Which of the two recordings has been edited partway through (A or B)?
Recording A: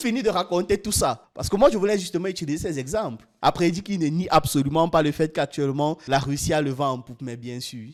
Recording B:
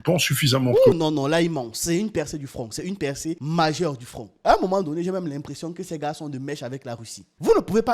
B